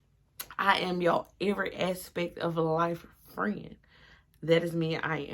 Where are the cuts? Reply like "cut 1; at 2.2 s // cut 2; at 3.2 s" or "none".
none